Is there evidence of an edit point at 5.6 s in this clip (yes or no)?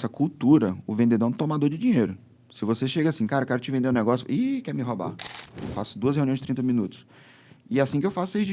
yes